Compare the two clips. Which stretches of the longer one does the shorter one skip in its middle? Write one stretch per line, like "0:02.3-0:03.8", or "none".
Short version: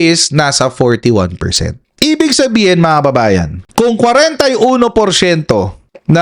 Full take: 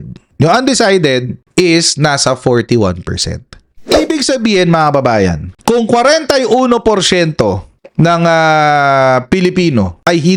0:03.8-0:04.0